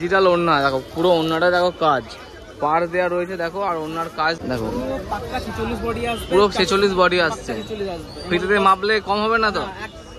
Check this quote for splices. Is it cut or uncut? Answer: cut